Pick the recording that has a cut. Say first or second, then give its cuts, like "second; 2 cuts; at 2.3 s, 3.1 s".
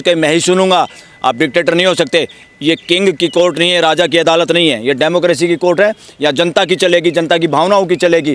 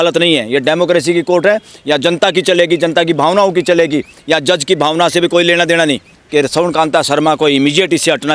second; 1 cut; at 6.1 s